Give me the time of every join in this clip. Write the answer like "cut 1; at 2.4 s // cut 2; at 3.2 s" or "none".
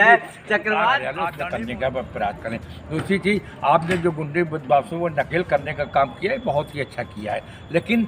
cut 1; at 1.1 s